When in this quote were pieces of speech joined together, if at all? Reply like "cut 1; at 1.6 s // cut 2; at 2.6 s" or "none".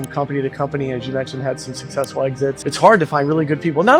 cut 1; at 2.6 s

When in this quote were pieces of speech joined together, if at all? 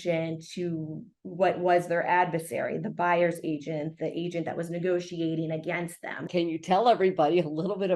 cut 1; at 6.3 s

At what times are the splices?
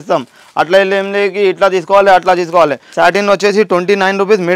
cut 1; at 2.8 s

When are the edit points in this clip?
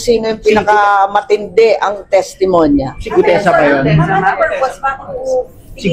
none

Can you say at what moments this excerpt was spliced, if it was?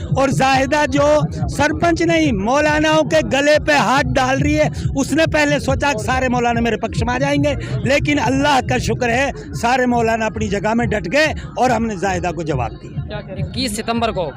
cut 1; at 13.5 s

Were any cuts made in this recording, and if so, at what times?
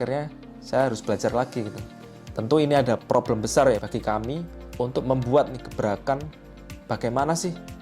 cut 1; at 3.0 s // cut 2; at 4.1 s

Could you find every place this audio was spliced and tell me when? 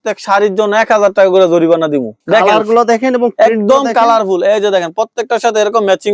cut 1; at 2.1 s

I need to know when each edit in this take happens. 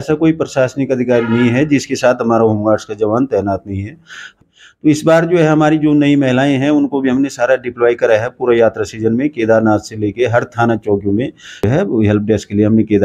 cut 1; at 4.3 s // cut 2; at 11.7 s

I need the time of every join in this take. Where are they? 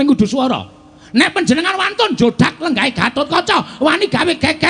none

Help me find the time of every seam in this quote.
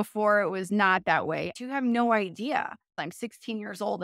cut 1; at 1.5 s // cut 2; at 2.9 s

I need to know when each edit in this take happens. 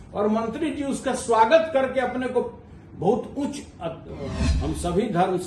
cut 1; at 4.4 s

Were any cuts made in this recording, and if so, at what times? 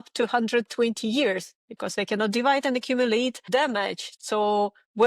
cut 1; at 3.5 s

